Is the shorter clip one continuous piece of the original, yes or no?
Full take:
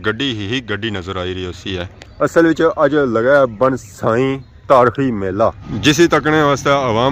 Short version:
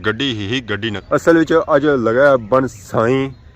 no